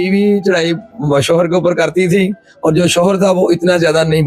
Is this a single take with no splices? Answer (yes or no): yes